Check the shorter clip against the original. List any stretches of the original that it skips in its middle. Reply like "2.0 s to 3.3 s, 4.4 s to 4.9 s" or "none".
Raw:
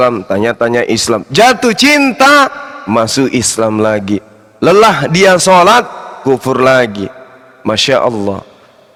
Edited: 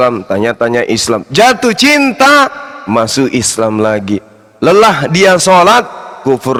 none

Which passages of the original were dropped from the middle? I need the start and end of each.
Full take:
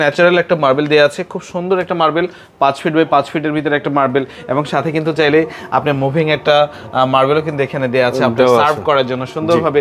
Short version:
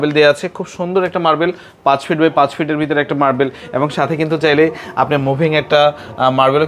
none

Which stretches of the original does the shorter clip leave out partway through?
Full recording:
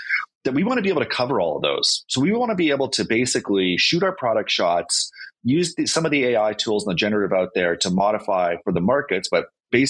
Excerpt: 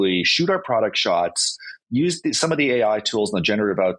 none

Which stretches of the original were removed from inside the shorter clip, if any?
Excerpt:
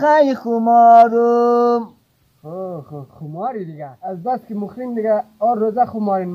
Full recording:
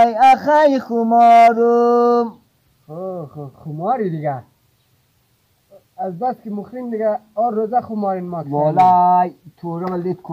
4.3 s to 5.8 s

